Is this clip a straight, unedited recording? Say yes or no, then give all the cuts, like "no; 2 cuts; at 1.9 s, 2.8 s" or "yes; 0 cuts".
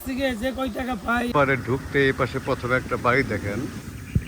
no; 1 cut; at 1.3 s